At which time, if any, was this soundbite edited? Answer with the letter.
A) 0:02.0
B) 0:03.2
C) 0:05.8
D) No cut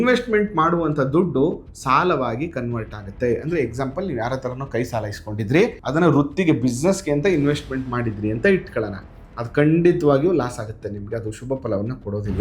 C